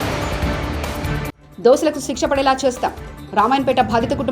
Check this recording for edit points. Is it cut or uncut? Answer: cut